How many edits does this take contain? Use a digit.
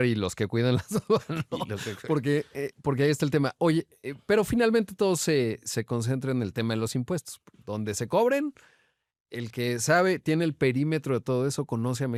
0